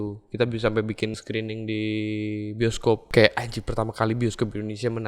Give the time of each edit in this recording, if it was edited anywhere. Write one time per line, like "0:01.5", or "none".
0:01.2
0:03.1